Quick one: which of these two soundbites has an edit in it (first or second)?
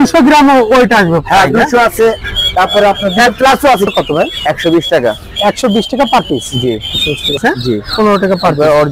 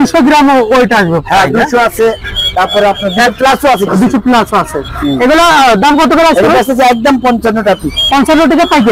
first